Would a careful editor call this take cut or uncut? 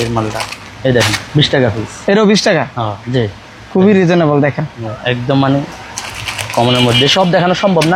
uncut